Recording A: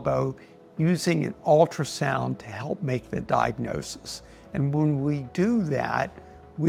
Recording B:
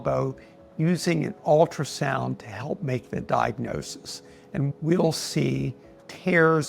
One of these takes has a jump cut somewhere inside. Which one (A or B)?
B